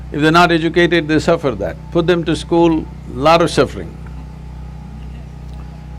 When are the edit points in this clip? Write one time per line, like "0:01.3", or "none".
none